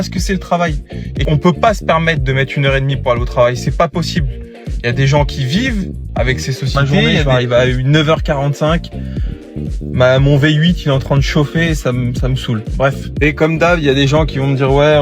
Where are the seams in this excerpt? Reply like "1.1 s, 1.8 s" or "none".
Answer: 1.3 s, 7.2 s, 13.0 s